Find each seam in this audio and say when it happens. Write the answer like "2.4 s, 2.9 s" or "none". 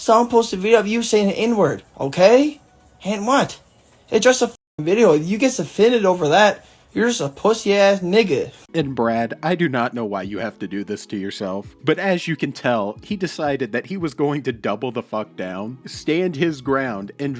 none